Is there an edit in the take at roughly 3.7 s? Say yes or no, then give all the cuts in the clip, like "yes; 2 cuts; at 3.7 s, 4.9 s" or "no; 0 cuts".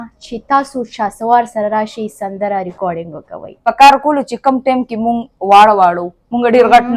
yes; 1 cut; at 3.7 s